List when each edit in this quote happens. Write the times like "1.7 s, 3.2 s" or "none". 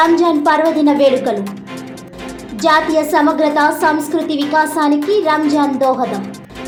none